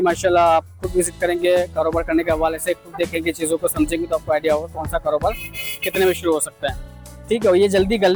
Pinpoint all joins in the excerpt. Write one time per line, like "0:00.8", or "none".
none